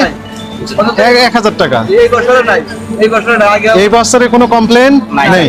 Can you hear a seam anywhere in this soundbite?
no; 0 cuts

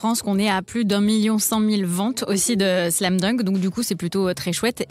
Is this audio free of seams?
yes; 0 cuts

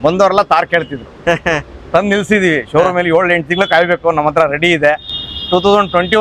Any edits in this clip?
no; 0 cuts

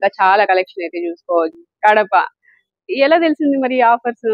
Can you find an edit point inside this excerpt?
yes; 1 cut; at 1.5 s

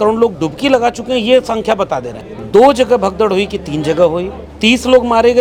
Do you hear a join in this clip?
no; 0 cuts

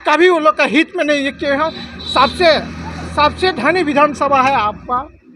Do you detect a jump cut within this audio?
no; 0 cuts

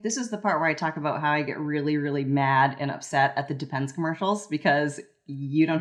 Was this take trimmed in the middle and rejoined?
no; 0 cuts

